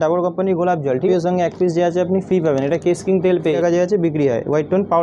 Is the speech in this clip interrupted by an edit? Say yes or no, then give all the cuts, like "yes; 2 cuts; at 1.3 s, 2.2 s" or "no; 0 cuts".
yes; 2 cuts; at 1.1 s, 3.6 s